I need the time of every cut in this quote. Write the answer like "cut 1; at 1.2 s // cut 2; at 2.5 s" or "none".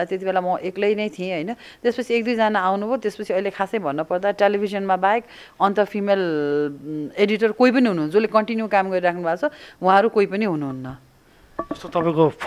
none